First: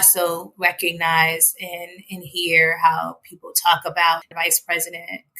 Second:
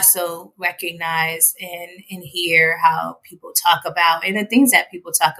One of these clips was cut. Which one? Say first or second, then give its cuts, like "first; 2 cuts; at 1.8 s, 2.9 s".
first; 1 cut; at 4.3 s